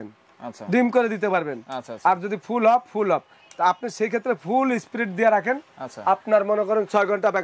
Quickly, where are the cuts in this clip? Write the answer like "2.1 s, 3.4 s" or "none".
none